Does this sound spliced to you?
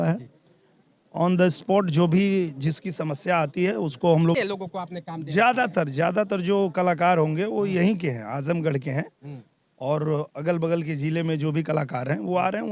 yes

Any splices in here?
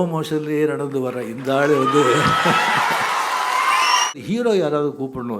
yes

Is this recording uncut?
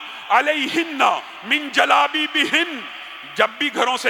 yes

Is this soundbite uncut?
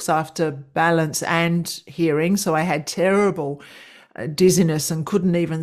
yes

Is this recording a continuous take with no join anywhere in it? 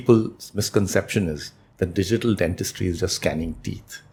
yes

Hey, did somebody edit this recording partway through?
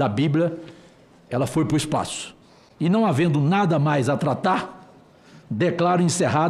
no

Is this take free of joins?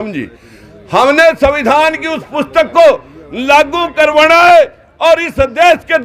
yes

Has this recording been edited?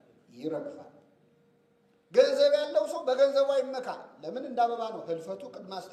no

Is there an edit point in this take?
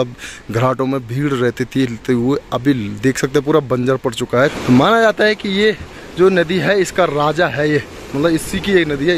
yes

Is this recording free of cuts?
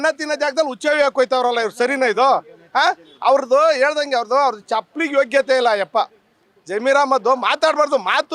yes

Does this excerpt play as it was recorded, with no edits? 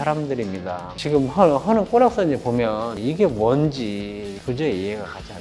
no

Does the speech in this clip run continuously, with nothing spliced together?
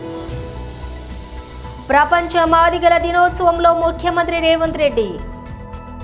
no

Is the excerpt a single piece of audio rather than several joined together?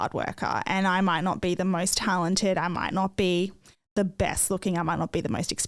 yes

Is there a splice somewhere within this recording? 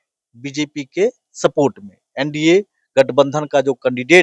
no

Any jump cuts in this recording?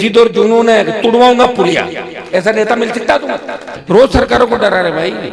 yes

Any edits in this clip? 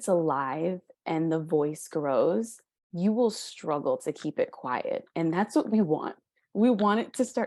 no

